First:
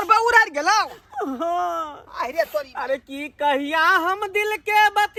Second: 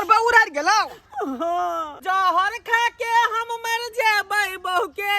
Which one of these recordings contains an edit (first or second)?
second